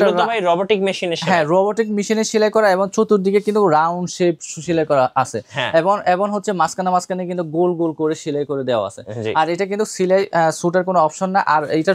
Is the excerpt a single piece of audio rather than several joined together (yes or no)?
yes